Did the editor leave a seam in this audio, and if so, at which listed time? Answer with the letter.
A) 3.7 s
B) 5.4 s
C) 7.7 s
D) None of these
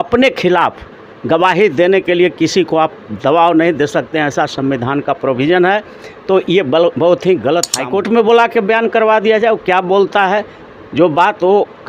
C